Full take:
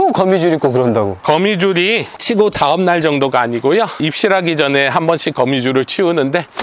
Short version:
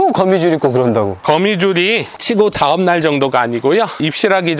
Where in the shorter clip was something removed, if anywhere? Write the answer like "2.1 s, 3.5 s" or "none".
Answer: none